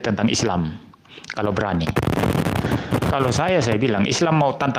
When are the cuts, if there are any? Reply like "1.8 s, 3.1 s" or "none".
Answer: none